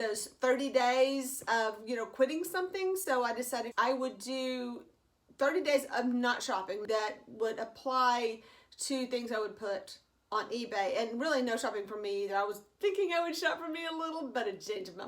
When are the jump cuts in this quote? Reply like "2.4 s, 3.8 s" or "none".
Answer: 3.7 s, 6.8 s